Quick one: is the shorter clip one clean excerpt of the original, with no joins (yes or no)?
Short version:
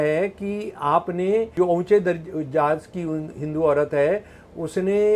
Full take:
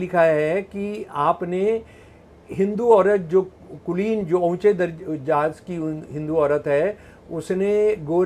no